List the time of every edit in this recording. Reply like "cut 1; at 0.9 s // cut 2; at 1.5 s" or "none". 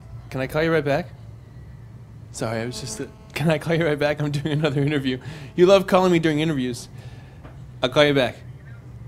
cut 1; at 5.7 s